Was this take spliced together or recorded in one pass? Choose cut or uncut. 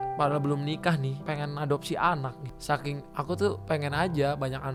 uncut